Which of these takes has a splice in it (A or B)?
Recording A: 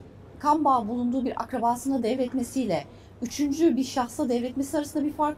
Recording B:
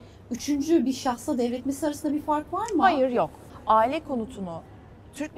B